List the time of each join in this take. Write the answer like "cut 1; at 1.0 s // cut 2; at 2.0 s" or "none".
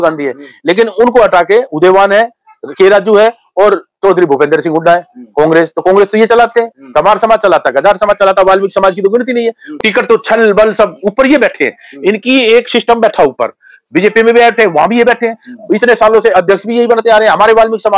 cut 1; at 9.8 s